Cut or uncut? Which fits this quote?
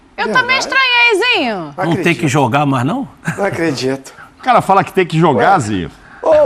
uncut